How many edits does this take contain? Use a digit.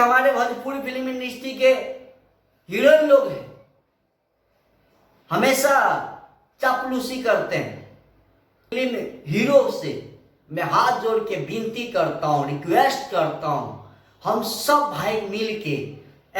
1